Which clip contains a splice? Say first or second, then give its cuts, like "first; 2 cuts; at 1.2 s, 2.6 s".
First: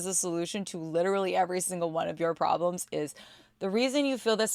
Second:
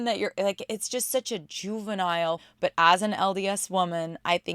second; 1 cut; at 2.5 s